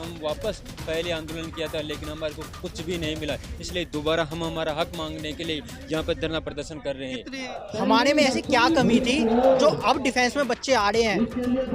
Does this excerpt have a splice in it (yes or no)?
yes